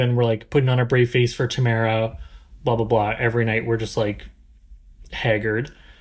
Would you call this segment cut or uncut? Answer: uncut